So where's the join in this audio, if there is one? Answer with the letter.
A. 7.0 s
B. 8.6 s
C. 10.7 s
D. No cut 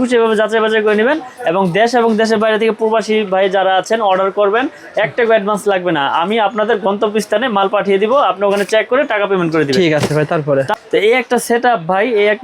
C